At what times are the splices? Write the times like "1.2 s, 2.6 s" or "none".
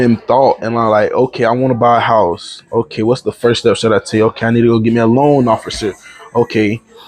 none